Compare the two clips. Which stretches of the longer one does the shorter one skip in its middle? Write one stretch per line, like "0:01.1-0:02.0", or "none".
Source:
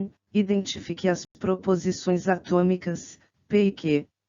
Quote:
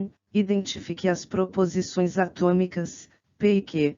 0:01.2-0:01.3